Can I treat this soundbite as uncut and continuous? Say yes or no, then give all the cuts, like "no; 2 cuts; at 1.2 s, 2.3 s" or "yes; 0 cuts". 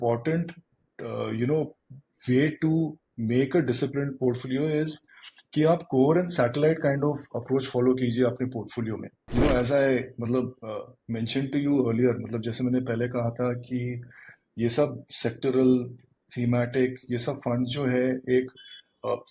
no; 1 cut; at 9.2 s